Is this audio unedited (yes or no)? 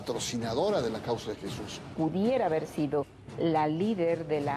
no